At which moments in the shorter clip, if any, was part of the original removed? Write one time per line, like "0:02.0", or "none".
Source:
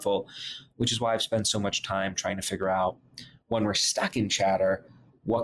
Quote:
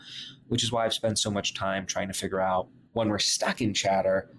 0:02.8